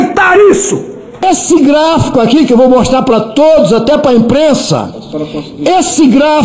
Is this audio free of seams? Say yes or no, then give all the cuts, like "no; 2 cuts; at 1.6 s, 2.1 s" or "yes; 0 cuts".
no; 1 cut; at 1.2 s